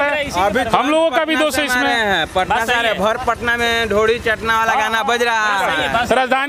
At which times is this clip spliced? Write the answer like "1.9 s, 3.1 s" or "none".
none